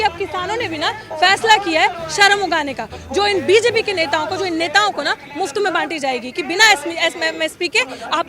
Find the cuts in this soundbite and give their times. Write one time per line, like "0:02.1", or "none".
none